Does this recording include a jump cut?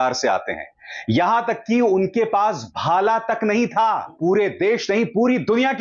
yes; 1 cut; at 4.1 s

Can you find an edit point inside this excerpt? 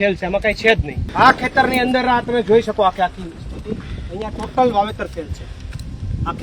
yes; 1 cut; at 1.0 s

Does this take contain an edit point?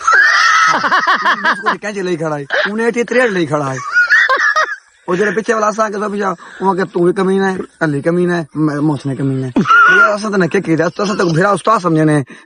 no; 0 cuts

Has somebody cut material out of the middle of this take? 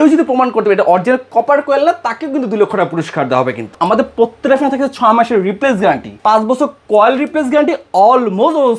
yes; 2 cuts; at 3.7 s, 6.1 s

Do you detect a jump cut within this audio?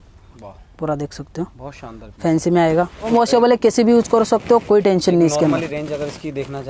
yes; 1 cut; at 3.1 s

